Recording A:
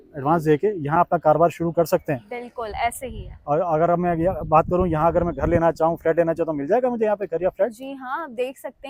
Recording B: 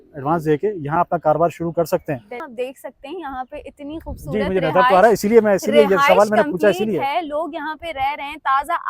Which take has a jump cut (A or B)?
B